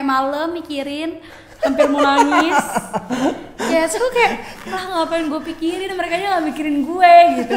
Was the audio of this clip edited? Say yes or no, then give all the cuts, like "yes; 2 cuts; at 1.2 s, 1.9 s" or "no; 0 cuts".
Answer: no; 0 cuts